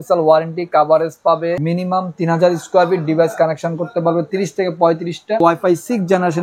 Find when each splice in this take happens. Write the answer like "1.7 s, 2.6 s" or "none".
1.6 s, 5.4 s